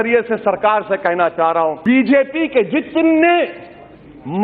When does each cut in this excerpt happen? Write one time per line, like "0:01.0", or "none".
0:01.8